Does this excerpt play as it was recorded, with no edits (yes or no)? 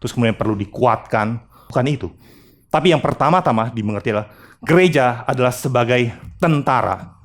no